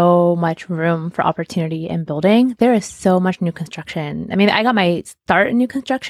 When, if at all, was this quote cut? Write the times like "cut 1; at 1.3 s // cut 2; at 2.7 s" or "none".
none